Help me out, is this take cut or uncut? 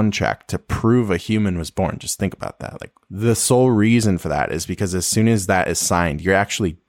uncut